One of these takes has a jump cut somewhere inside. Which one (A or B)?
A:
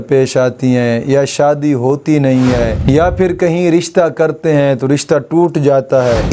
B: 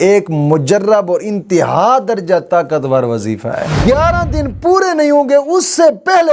B